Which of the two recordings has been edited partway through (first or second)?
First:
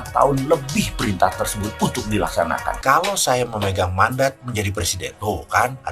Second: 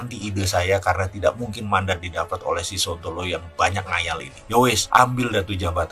first